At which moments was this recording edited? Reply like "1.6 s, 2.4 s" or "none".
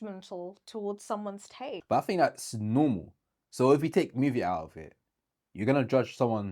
1.8 s